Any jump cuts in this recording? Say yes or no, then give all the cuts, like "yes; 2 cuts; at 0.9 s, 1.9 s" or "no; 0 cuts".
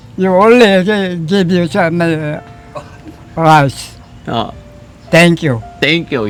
no; 0 cuts